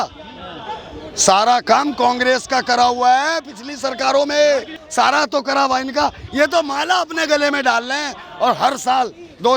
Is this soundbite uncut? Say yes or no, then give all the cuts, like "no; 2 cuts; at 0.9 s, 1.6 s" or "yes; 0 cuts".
no; 1 cut; at 4.8 s